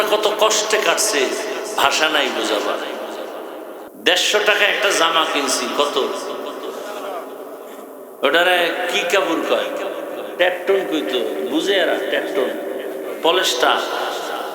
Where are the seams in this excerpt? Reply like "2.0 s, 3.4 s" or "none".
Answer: 3.8 s